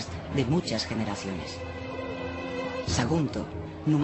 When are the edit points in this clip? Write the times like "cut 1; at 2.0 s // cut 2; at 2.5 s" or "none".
cut 1; at 2.5 s